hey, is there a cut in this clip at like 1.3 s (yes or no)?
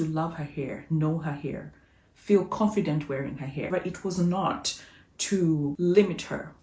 no